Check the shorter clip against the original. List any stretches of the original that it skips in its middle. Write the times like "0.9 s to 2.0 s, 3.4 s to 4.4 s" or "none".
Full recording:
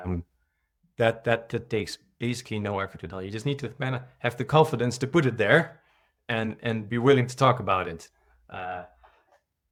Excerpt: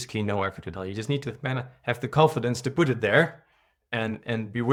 none